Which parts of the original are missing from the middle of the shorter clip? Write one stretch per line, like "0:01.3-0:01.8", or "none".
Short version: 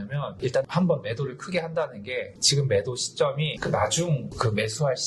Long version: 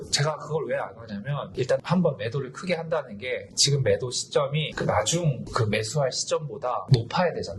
none